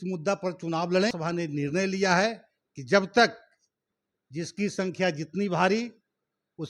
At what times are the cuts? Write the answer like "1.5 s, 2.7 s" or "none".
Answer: 1.1 s